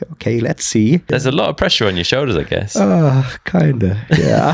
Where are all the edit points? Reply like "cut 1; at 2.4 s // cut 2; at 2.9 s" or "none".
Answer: cut 1; at 1.1 s

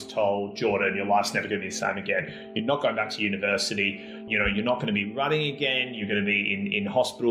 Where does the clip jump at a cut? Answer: cut 1; at 4.2 s

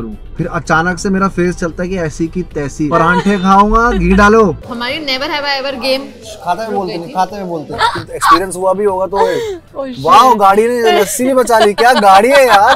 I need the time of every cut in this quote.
cut 1; at 2.9 s // cut 2; at 4.7 s // cut 3; at 7.7 s

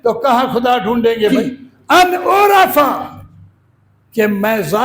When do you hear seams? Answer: cut 1; at 1.3 s

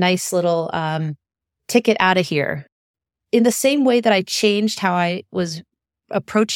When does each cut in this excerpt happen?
cut 1; at 2.8 s

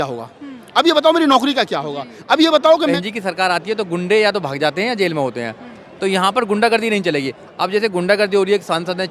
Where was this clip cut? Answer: cut 1; at 3.0 s

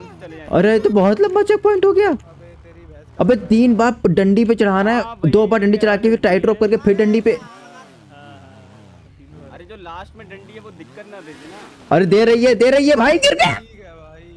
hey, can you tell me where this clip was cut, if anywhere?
none

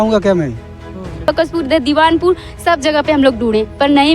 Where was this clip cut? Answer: cut 1; at 1.3 s

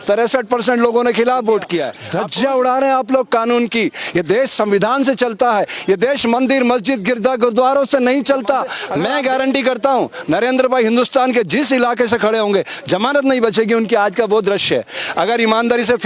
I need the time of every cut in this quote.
cut 1; at 2.0 s // cut 2; at 8.8 s

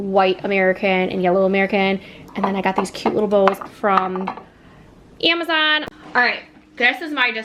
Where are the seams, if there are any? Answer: cut 1; at 5.9 s

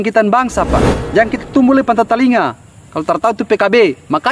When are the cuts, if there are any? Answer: cut 1; at 1.0 s

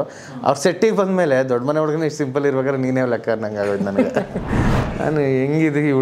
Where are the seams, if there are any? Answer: cut 1; at 4.7 s

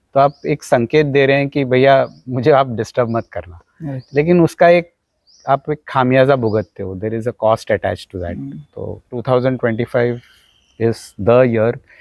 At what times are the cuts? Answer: cut 1; at 9.1 s

